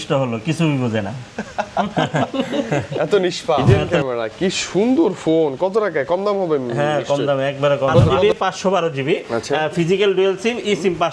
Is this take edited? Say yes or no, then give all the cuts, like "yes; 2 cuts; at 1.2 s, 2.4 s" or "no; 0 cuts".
yes; 2 cuts; at 3.6 s, 8.2 s